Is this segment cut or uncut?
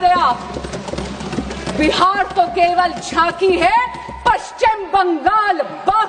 uncut